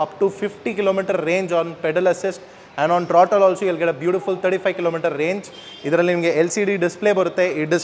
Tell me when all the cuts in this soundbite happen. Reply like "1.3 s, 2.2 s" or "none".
none